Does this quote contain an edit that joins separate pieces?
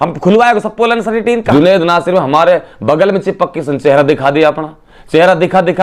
yes; 1 cut; at 1.4 s

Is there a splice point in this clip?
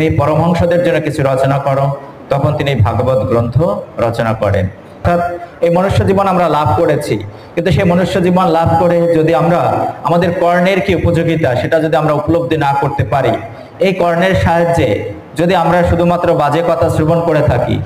yes; 1 cut; at 5.0 s

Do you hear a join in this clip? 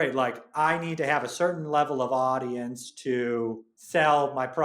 yes; 1 cut; at 3.7 s

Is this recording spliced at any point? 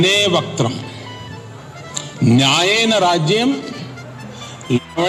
no; 0 cuts

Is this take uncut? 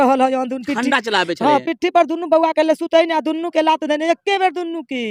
yes; 0 cuts

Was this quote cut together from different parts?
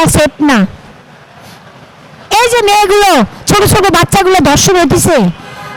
no; 0 cuts

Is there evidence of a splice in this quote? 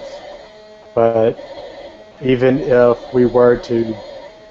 no; 0 cuts

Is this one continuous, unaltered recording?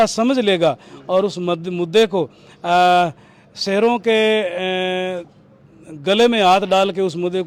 yes; 0 cuts

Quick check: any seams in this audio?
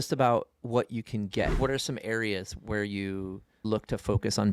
yes; 2 cuts; at 1.6 s, 3.6 s

